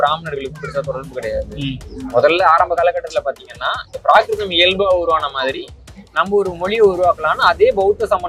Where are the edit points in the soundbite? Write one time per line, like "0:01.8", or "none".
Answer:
none